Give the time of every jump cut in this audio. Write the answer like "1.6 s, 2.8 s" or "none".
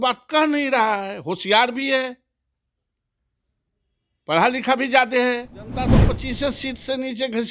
5.9 s